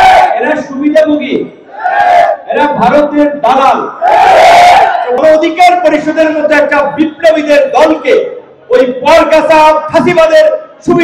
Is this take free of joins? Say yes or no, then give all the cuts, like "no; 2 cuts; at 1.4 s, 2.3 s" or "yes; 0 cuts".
no; 1 cut; at 5.2 s